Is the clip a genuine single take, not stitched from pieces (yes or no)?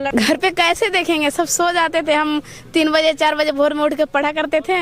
yes